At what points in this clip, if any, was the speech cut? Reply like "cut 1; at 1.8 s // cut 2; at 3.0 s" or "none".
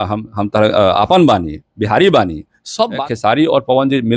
cut 1; at 3.0 s